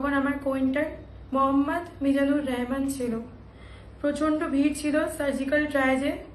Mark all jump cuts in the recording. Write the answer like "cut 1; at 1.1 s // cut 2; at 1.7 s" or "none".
none